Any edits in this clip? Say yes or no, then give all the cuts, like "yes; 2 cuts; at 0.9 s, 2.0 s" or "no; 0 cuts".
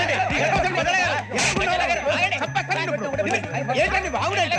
no; 0 cuts